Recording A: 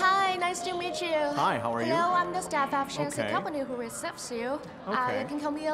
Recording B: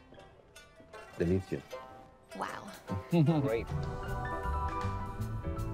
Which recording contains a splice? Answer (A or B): B